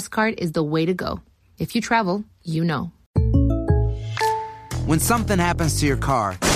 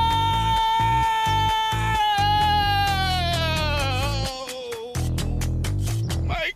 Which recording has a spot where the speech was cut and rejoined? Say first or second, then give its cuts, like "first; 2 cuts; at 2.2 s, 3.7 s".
first; 2 cuts; at 3.0 s, 4.7 s